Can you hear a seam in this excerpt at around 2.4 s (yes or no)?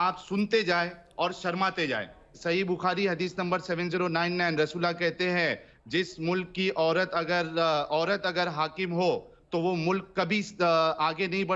yes